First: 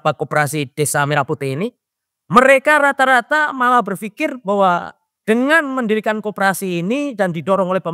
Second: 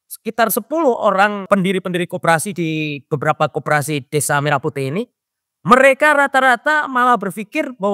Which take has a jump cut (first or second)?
second